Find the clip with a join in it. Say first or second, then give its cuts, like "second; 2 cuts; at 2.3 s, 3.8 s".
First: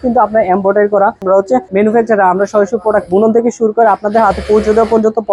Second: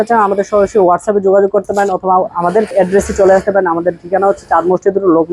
first; 1 cut; at 1.4 s